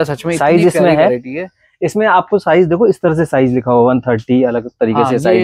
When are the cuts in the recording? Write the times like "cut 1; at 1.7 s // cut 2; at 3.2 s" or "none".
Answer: none